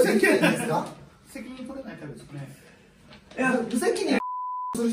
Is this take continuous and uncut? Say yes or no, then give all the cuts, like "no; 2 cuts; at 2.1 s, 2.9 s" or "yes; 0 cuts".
yes; 0 cuts